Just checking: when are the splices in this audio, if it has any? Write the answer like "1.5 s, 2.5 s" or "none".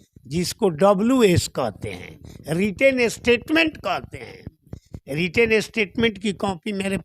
none